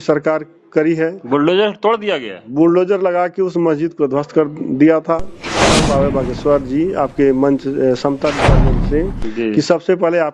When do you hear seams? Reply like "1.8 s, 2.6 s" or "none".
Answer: 5.7 s